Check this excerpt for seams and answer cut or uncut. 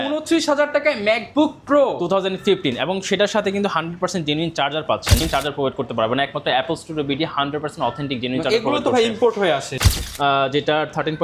cut